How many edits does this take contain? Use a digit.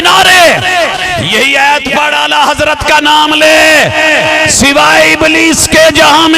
1